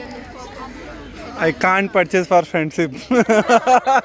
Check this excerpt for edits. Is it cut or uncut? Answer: uncut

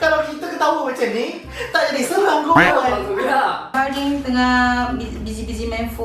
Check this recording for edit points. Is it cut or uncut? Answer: cut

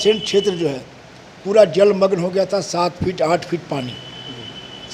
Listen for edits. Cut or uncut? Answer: uncut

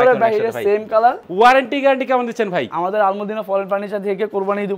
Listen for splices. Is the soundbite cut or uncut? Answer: cut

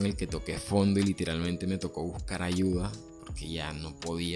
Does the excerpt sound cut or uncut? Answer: uncut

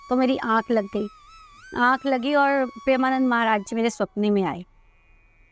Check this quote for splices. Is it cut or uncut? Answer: uncut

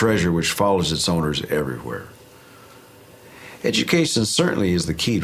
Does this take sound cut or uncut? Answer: cut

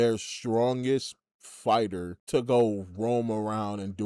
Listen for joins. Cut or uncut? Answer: uncut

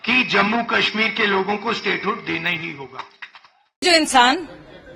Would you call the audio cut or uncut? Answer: uncut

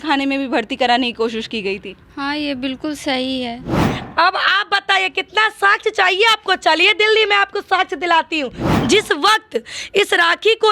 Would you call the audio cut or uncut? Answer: cut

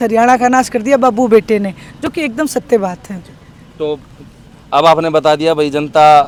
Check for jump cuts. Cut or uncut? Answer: uncut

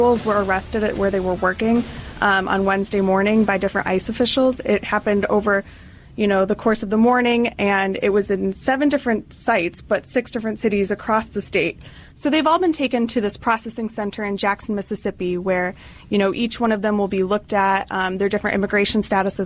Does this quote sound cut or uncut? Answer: uncut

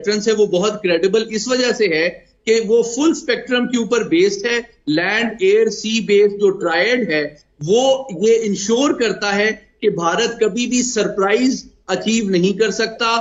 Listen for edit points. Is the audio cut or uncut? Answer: uncut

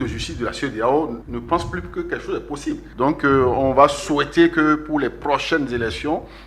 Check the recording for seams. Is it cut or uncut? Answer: cut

